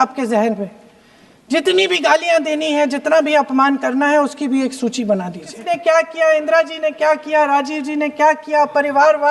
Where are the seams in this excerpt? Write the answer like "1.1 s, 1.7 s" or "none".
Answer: 5.5 s

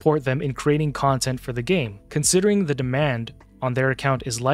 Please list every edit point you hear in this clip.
2.0 s

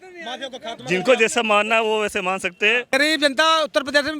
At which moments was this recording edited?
2.9 s

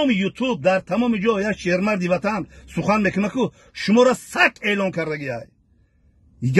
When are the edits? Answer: none

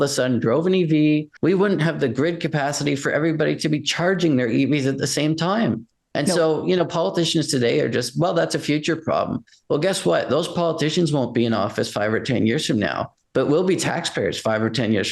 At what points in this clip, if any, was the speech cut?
1.3 s

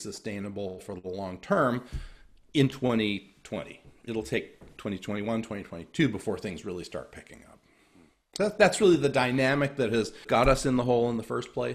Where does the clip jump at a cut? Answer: 10.2 s

